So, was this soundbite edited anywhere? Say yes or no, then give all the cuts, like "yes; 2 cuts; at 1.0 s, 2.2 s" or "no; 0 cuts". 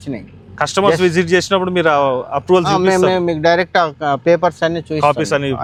no; 0 cuts